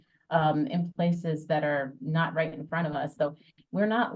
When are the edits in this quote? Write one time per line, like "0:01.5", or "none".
none